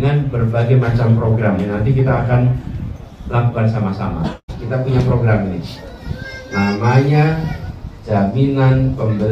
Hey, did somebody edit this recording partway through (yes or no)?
yes